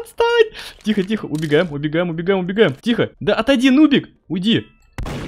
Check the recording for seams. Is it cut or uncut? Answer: cut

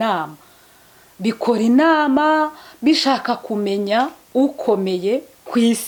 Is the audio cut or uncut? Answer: uncut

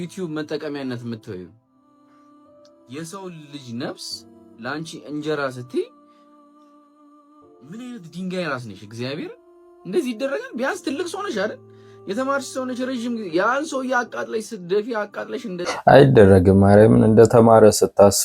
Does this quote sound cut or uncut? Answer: uncut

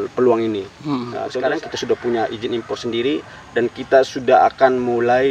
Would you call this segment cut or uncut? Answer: cut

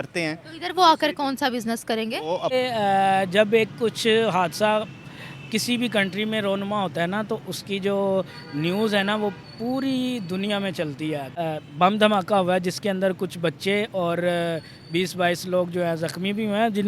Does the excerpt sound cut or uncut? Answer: cut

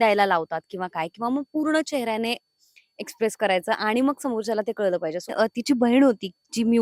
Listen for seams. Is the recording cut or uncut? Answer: cut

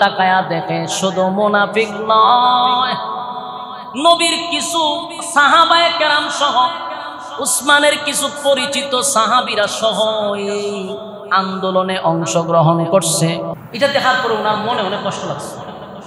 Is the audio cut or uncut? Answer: cut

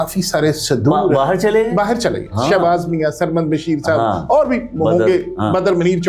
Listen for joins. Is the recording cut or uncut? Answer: uncut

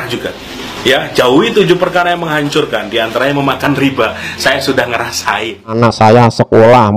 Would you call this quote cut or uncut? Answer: cut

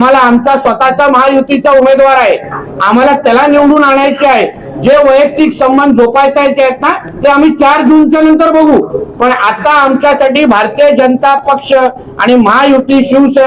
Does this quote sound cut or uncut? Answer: uncut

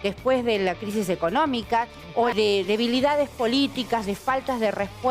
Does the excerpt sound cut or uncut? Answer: cut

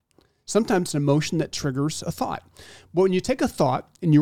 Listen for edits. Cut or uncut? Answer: uncut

